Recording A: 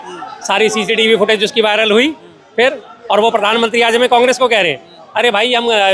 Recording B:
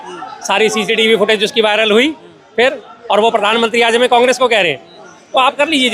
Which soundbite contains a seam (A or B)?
B